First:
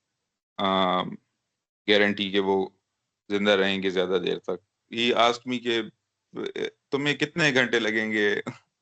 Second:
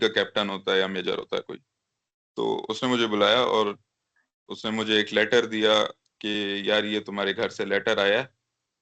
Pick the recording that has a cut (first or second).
first